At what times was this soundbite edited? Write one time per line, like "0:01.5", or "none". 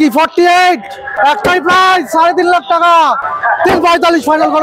0:01.2
0:03.2